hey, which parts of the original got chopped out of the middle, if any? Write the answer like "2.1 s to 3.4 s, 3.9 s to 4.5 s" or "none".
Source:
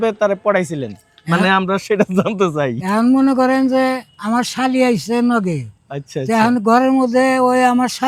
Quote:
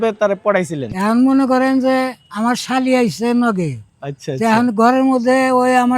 0.9 s to 2.8 s